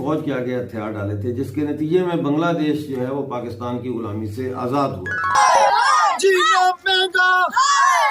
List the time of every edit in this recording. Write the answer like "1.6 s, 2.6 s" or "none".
5.4 s